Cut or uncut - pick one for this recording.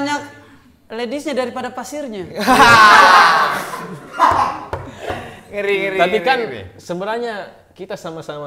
uncut